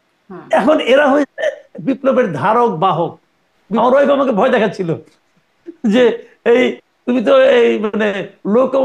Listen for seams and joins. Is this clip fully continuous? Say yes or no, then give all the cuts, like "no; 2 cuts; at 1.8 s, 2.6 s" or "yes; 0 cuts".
no; 1 cut; at 3.8 s